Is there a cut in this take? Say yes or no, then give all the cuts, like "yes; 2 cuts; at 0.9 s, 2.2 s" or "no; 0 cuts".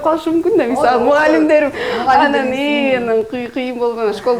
no; 0 cuts